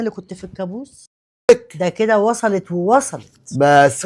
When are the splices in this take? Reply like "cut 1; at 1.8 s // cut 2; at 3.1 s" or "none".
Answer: cut 1; at 1.5 s